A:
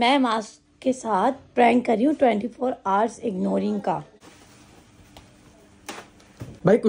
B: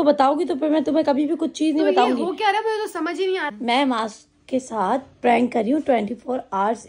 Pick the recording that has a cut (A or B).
A